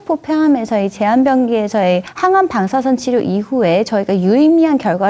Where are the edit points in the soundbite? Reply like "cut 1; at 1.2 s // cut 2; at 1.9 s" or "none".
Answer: none